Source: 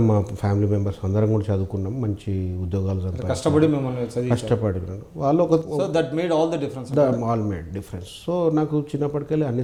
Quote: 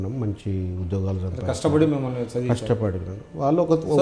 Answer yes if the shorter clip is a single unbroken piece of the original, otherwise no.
yes